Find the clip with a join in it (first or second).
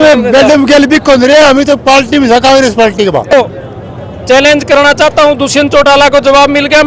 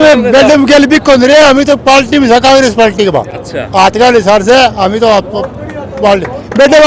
first